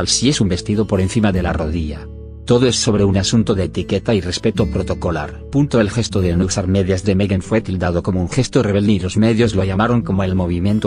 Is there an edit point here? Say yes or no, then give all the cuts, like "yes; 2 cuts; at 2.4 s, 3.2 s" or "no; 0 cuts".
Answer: yes; 1 cut; at 7.7 s